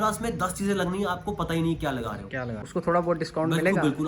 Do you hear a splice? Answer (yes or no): yes